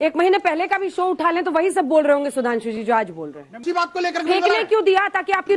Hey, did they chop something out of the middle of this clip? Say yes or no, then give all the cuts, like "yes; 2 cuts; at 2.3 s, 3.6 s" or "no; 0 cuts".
yes; 1 cut; at 3.6 s